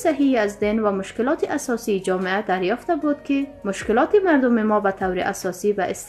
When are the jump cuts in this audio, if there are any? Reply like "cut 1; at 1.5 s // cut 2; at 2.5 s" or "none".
cut 1; at 3.6 s